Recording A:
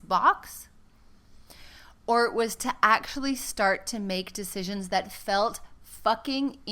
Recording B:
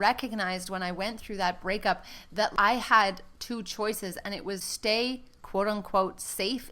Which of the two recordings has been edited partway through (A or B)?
B